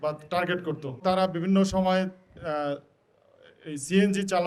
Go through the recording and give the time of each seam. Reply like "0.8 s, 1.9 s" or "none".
1.0 s